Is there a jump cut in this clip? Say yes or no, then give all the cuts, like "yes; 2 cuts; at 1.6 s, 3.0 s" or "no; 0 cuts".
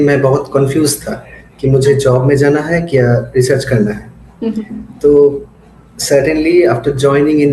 no; 0 cuts